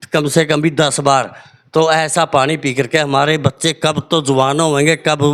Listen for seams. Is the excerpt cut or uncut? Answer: uncut